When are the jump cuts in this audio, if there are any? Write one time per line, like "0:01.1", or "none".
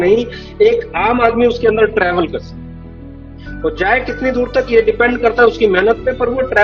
none